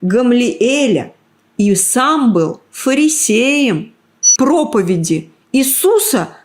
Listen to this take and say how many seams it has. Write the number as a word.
one